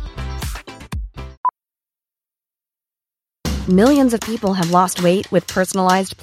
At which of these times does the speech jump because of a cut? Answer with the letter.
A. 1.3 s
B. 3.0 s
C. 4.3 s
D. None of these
A